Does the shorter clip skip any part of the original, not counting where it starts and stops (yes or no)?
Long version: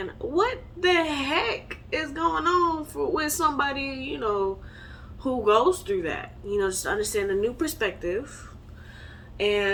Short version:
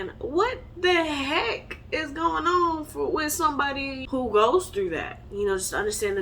yes